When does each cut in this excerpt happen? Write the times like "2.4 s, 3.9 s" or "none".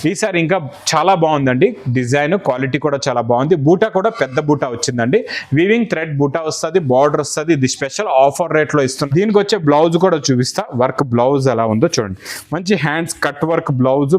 9.0 s